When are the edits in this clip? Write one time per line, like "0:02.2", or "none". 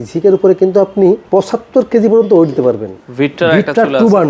0:01.2
0:03.0